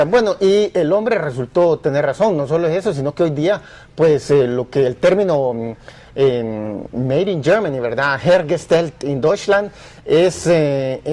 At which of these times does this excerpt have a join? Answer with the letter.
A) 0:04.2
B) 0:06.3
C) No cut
B